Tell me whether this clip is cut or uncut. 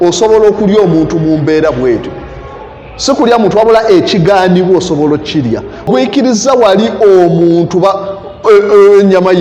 cut